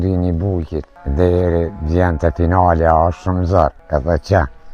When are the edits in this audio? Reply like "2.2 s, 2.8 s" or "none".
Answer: 1.0 s, 3.8 s